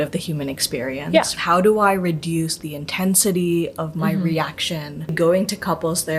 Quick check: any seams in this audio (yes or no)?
yes